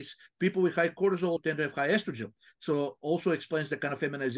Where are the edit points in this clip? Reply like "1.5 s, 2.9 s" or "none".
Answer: 1.4 s